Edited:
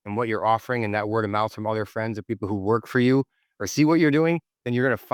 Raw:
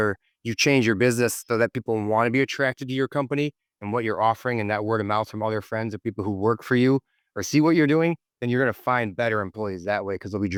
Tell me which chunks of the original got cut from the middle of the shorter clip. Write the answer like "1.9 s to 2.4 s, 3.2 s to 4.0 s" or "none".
none